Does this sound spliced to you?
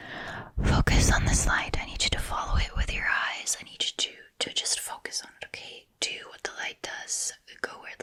no; 0 cuts

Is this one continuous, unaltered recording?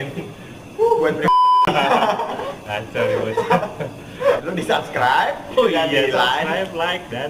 no; 1 cut; at 4.4 s

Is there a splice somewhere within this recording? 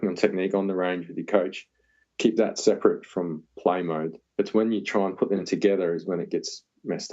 yes; 1 cut; at 4.2 s

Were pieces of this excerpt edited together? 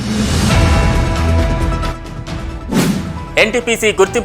yes; 2 cuts; at 2.1 s, 3.3 s

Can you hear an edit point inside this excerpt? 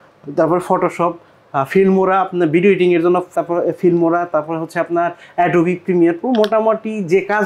no; 0 cuts

